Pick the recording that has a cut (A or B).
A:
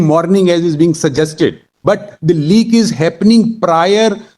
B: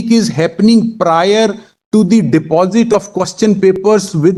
A